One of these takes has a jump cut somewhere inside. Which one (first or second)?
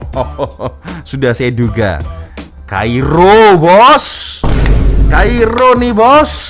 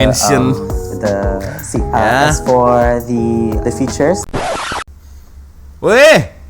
second